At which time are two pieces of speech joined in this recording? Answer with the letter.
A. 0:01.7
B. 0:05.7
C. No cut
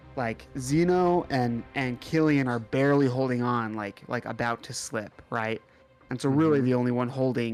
C